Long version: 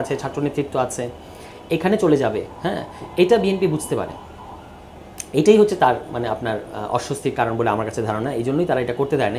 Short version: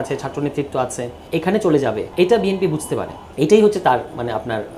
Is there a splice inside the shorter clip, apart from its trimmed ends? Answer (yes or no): yes